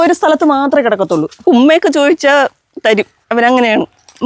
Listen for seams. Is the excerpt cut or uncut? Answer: cut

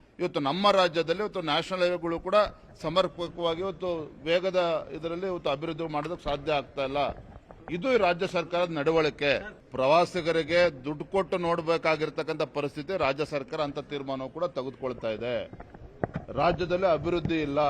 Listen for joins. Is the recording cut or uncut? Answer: cut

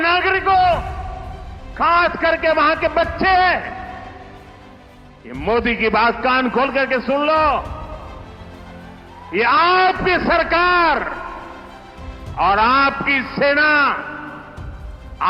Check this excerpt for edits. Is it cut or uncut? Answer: uncut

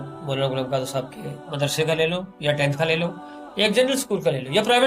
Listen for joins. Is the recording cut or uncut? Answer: uncut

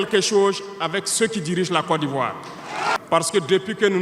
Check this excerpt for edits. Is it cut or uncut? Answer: cut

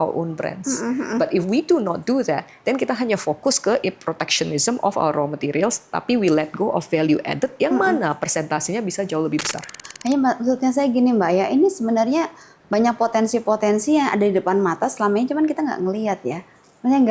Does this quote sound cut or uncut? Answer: cut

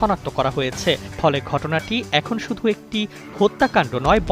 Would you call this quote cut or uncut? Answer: cut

